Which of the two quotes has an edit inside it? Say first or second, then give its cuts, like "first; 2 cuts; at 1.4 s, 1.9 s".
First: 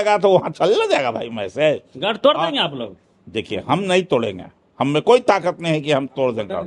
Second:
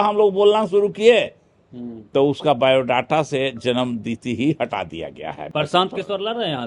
second; 1 cut; at 5.4 s